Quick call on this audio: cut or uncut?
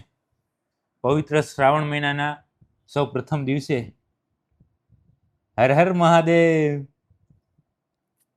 uncut